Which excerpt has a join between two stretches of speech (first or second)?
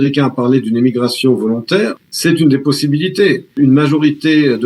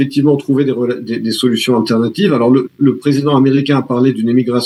first